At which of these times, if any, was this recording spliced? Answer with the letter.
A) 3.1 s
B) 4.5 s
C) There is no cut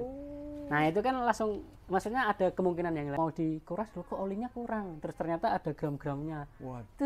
A